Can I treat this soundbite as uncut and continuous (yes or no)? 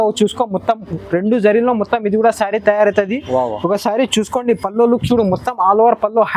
yes